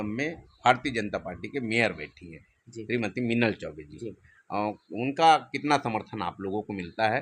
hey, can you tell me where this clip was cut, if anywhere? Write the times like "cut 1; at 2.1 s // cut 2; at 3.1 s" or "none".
none